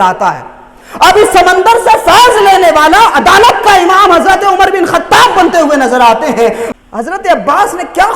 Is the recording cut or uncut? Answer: cut